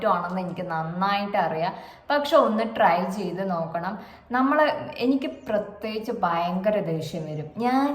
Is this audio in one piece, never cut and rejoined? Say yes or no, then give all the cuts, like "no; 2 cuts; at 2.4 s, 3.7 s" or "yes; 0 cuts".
yes; 0 cuts